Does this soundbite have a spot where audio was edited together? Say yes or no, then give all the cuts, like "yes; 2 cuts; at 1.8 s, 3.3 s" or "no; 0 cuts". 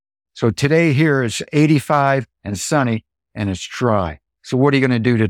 no; 0 cuts